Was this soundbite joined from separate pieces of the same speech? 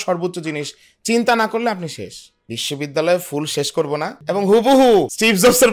yes; 1 cut; at 2.2 s

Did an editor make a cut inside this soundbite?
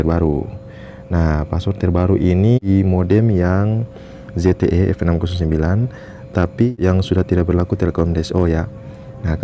yes; 2 cuts; at 2.6 s, 6.7 s

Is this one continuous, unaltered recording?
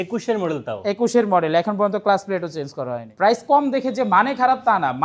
no; 1 cut; at 3.4 s

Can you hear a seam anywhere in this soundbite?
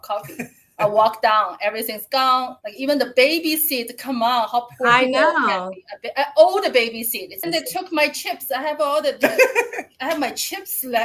yes; 2 cuts; at 2.6 s, 7.5 s

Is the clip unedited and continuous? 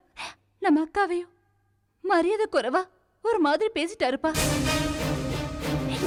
yes; 0 cuts

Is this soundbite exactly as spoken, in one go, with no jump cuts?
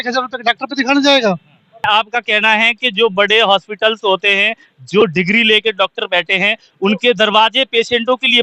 no; 1 cut; at 1.8 s

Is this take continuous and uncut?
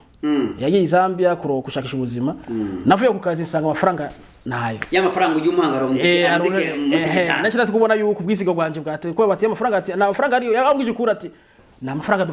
yes; 0 cuts

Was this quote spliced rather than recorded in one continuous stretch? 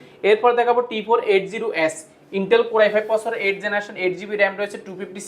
no; 0 cuts

